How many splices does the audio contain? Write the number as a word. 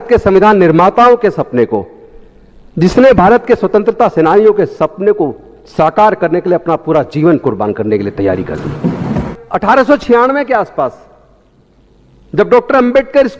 one